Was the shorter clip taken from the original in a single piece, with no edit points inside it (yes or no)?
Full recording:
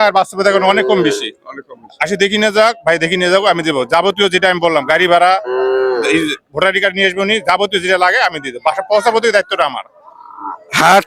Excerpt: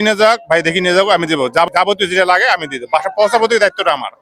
no